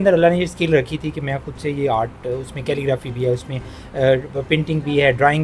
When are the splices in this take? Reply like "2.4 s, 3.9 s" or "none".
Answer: none